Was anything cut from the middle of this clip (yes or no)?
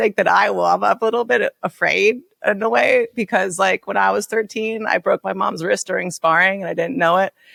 no